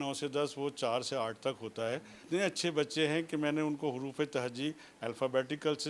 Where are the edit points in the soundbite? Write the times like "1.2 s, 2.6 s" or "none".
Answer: 2.2 s

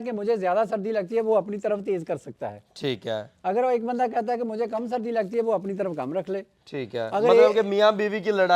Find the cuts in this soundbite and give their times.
none

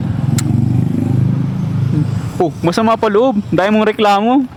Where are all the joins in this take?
none

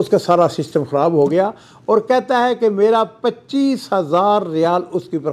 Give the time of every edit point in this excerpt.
none

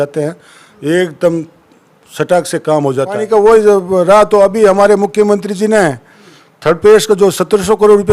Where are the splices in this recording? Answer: 3.2 s

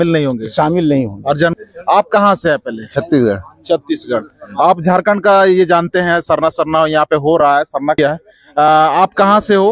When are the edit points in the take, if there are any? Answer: 1.5 s, 8.0 s

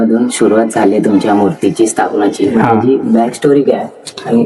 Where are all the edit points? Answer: none

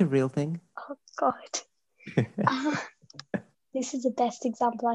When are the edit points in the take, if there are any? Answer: 3.6 s

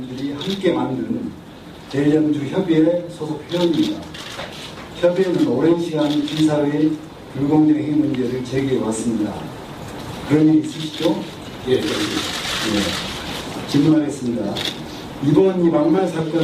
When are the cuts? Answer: 10.6 s

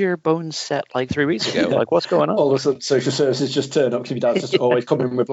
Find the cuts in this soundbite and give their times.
none

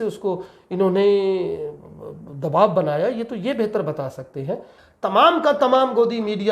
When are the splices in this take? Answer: 4.8 s

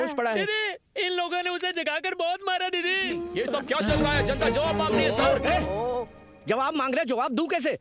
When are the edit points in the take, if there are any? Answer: 3.3 s

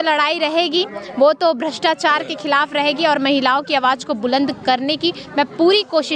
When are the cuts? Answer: none

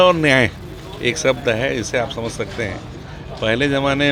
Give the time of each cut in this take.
none

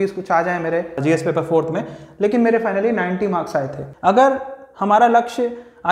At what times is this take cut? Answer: 1.0 s, 3.8 s

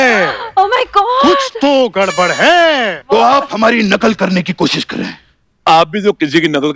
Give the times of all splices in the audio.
3.0 s

